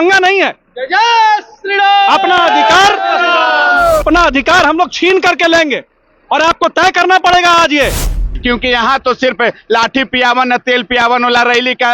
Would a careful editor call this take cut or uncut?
cut